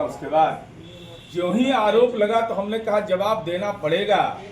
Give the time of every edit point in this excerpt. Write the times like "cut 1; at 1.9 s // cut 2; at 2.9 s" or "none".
none